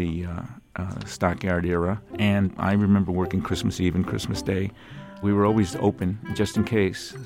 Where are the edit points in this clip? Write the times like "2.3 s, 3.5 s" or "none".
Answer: 2.5 s, 5.2 s